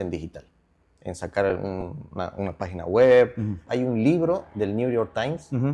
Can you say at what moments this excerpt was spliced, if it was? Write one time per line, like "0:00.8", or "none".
0:03.7